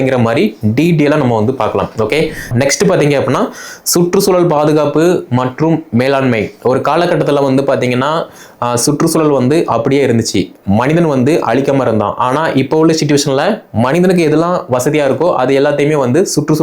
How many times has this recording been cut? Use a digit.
1